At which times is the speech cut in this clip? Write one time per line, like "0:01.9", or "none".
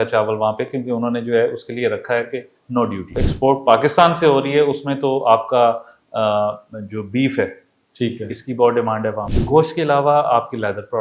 0:03.2
0:09.3

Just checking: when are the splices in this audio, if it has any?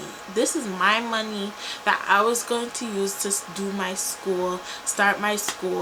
none

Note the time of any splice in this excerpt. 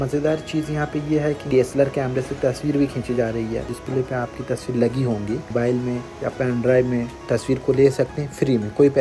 0:01.4
0:03.8
0:05.5

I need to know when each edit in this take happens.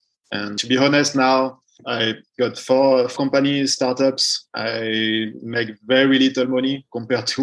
0:03.1

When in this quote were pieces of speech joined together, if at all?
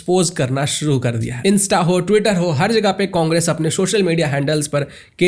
0:01.3

